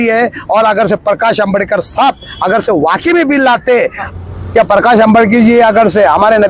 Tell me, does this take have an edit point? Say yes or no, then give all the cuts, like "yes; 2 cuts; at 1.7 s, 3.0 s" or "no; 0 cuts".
yes; 1 cut; at 4.1 s